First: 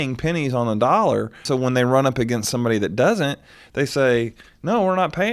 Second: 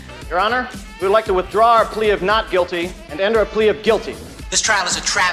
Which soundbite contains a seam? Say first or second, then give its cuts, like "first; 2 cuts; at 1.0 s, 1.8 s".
first; 1 cut; at 1.4 s